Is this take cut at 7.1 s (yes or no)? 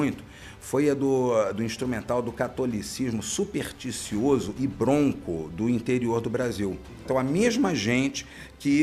yes